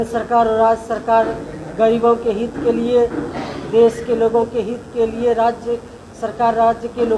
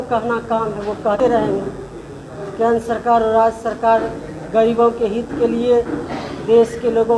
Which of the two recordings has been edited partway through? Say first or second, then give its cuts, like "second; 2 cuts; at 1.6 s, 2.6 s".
second; 1 cut; at 1.2 s